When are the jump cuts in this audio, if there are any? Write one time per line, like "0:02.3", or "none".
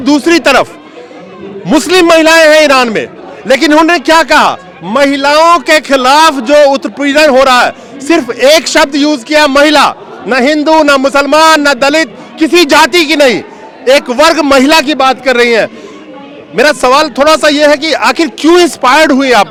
none